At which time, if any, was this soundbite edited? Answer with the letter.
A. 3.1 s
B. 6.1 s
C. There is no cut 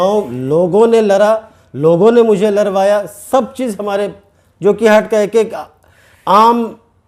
C